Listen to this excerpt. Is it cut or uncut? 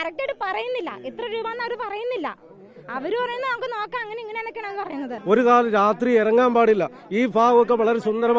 cut